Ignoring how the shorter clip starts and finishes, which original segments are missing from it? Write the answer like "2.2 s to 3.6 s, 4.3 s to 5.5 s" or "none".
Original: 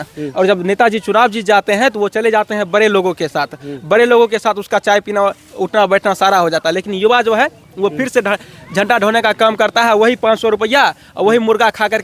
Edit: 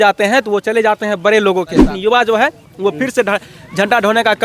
3.4 s to 6.9 s